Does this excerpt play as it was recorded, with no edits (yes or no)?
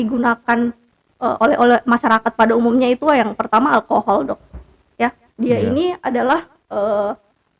no